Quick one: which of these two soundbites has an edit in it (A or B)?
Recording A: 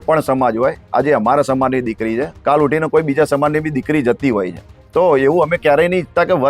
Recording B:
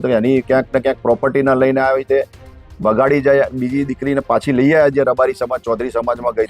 B